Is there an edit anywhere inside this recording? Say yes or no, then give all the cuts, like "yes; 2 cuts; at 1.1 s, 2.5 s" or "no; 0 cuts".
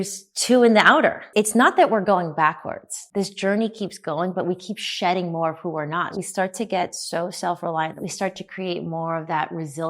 yes; 4 cuts; at 1.2 s, 2.9 s, 6.2 s, 8.0 s